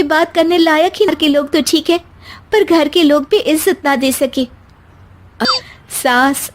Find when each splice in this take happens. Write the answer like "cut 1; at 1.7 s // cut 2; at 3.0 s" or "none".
cut 1; at 1.1 s // cut 2; at 5.4 s